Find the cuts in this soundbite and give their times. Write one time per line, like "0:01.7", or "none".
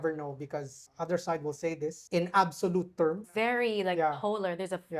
0:00.8
0:02.0
0:03.2